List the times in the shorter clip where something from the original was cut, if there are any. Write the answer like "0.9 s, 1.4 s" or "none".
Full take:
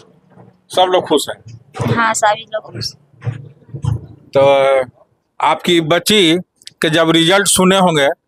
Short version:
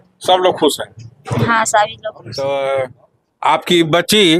2.2 s

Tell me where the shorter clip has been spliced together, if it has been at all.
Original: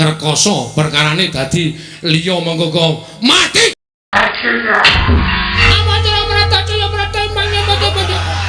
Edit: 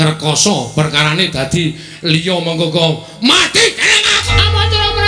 4.1 s

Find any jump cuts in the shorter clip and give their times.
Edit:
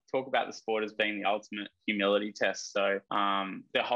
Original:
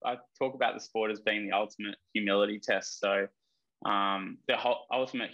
3.0 s

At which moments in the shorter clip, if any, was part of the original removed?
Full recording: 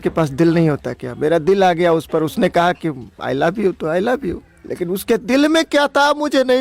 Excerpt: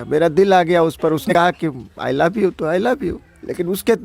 1.3 s

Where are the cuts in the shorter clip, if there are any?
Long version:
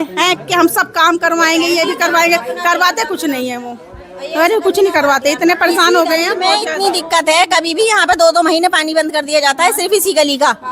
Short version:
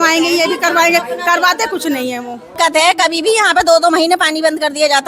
2.5 s

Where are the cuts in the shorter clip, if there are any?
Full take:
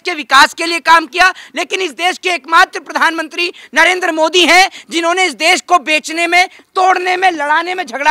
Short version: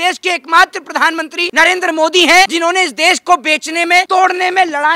1.4 s, 2.5 s, 4.1 s

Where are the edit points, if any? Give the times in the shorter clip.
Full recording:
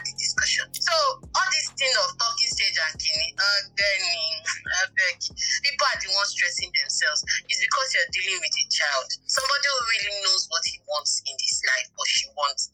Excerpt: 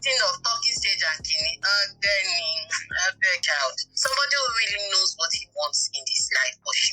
3.4 s

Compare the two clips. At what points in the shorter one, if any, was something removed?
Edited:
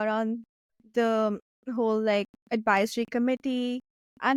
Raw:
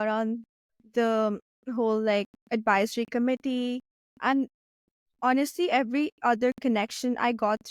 none

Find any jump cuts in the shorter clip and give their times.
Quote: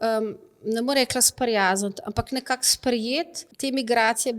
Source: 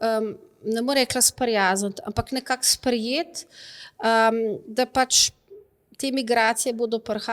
3.4 s

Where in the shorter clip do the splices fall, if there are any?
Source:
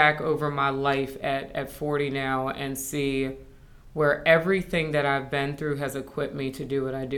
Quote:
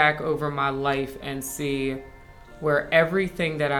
1.2 s

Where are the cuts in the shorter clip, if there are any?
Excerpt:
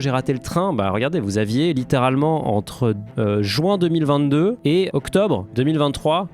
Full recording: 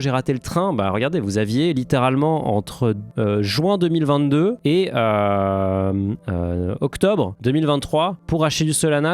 4.9 s

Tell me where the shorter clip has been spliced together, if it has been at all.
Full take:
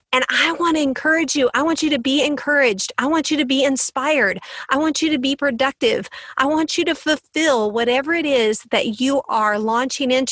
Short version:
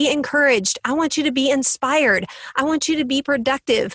none

